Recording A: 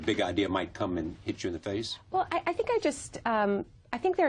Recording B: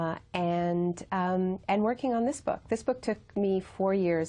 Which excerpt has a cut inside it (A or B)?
B